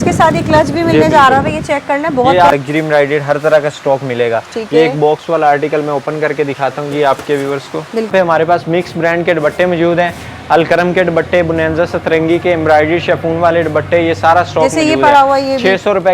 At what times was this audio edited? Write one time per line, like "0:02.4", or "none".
0:02.5
0:08.1